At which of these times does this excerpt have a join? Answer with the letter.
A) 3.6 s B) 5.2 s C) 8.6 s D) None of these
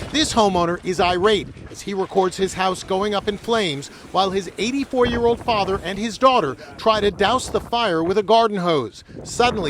C